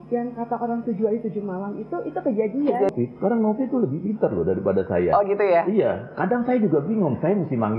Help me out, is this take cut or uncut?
cut